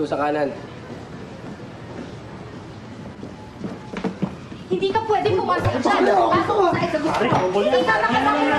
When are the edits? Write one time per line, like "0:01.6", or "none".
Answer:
0:04.8